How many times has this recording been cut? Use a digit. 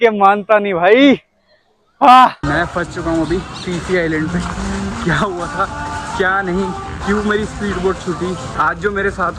2